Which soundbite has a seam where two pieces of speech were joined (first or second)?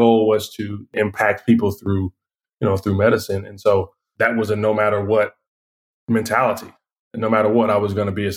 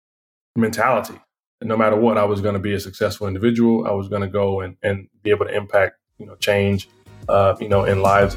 first